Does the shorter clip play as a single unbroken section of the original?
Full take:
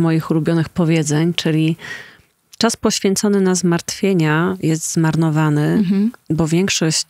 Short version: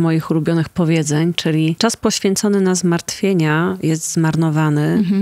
no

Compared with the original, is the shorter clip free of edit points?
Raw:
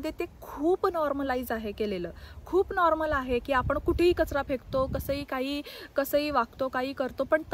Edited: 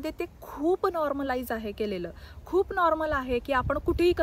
yes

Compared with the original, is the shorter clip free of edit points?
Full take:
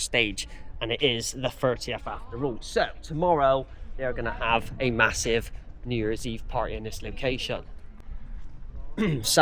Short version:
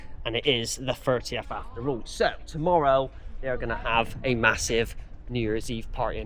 yes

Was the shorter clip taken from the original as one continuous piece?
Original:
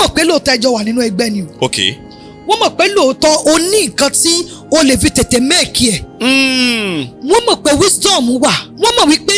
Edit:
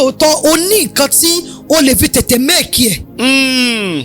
yes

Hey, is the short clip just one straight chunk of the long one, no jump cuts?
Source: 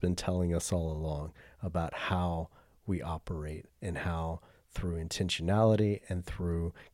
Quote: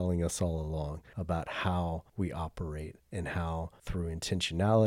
no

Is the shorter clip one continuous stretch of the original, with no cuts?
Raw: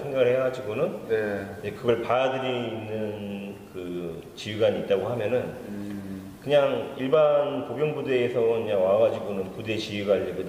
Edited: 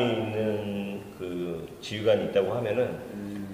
yes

